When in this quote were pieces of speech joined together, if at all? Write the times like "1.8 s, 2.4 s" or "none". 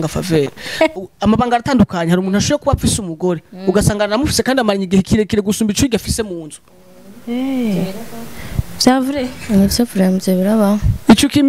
0.9 s